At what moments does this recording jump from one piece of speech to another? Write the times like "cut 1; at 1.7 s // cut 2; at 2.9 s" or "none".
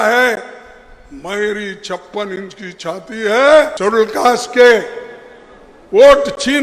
cut 1; at 3.7 s